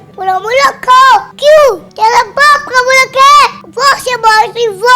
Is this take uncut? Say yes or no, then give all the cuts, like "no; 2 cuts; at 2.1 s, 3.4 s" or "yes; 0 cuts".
no; 3 cuts; at 1.3 s, 1.9 s, 3.6 s